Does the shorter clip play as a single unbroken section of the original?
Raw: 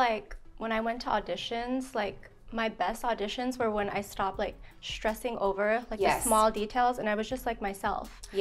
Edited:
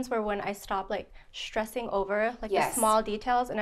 yes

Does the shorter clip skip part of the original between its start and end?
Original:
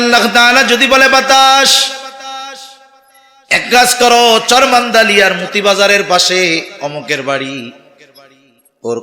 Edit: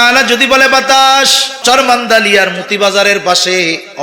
yes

